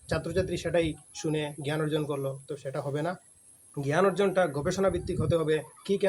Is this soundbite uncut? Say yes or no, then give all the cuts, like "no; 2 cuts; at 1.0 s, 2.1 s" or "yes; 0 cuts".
yes; 0 cuts